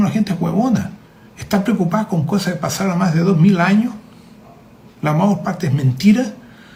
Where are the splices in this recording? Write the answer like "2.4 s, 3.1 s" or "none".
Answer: none